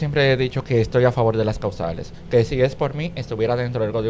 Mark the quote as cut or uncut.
uncut